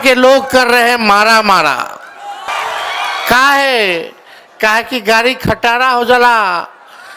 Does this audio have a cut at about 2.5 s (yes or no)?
yes